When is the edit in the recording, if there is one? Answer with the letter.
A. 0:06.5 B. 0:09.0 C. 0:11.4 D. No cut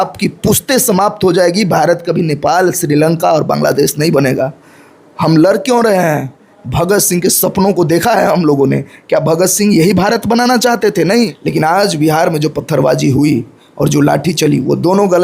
C